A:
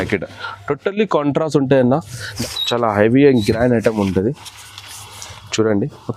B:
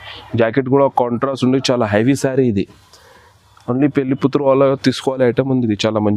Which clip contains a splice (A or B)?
A